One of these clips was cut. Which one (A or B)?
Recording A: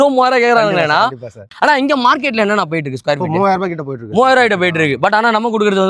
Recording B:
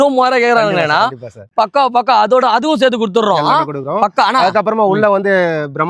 A